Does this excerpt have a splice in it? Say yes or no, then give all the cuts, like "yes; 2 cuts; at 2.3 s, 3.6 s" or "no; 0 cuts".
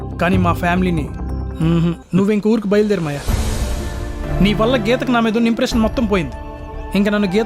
yes; 2 cuts; at 2.1 s, 4.2 s